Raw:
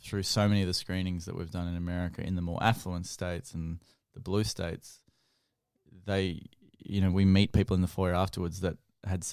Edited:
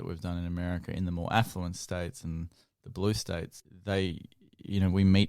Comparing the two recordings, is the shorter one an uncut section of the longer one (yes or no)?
no